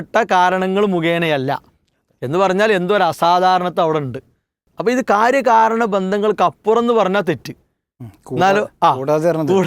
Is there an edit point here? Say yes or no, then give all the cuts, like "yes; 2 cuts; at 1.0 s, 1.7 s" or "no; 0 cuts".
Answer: yes; 1 cut; at 4.7 s